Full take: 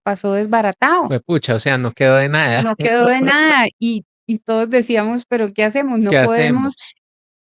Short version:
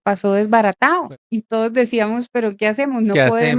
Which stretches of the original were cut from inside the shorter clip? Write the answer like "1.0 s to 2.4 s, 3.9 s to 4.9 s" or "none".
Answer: 1.1 s to 4.1 s